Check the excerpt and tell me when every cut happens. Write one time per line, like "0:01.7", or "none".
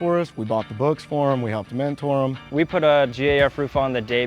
0:02.4